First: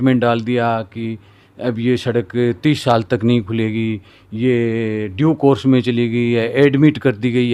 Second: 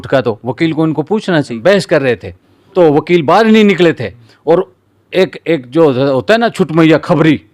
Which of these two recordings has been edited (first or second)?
second